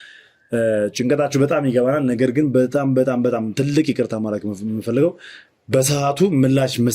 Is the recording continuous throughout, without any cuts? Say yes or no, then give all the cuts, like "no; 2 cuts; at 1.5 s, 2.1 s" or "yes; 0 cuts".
yes; 0 cuts